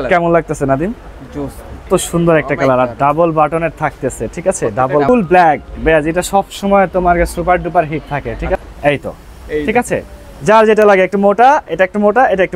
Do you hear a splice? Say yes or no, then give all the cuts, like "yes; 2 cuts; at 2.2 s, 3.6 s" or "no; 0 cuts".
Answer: yes; 3 cuts; at 1.9 s, 5.1 s, 8.6 s